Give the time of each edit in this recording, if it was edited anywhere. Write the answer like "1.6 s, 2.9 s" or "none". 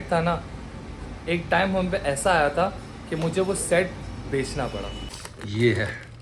5.2 s